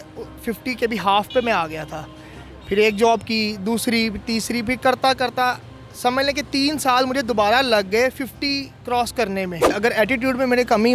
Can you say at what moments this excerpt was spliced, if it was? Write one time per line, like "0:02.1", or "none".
0:09.7